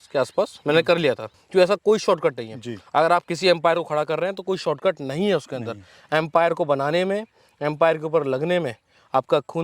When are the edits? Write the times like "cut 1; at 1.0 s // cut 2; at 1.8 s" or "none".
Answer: cut 1; at 1.3 s

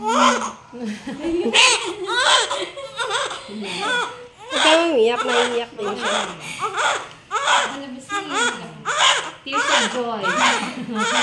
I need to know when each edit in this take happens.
none

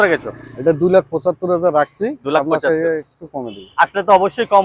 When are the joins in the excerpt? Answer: none

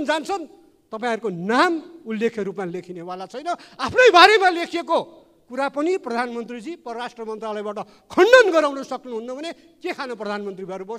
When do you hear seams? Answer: none

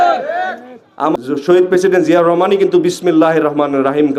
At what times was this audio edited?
cut 1; at 1.1 s

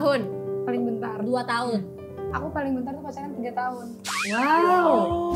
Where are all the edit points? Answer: none

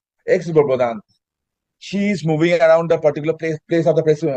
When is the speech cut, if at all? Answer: none

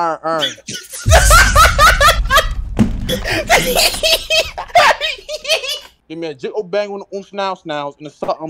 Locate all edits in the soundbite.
cut 1; at 3.0 s // cut 2; at 6.1 s

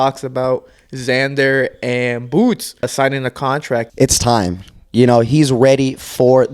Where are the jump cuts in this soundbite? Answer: cut 1; at 2.9 s // cut 2; at 3.9 s

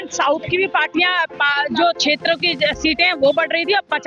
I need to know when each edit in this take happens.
none

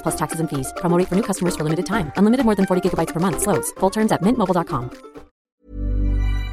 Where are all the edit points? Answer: cut 1; at 5.5 s

